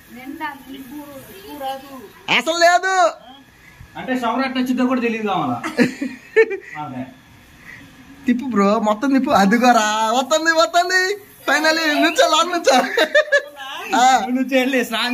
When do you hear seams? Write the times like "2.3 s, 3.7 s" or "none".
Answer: none